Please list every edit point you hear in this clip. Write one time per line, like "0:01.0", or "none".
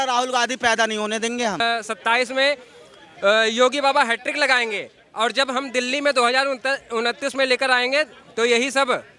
0:01.6

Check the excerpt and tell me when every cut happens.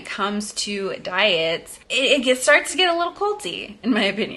none

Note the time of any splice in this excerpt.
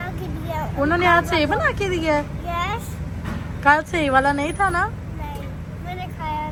none

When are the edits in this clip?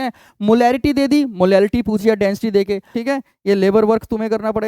0:02.9

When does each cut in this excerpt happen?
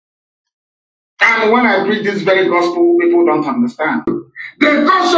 0:04.1

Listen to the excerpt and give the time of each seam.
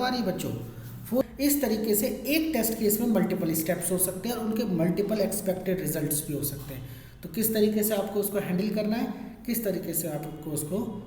0:01.2

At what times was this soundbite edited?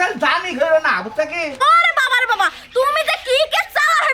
0:01.5

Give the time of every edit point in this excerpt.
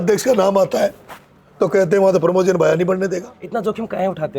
0:03.4

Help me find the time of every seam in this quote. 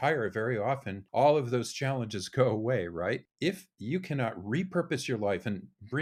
none

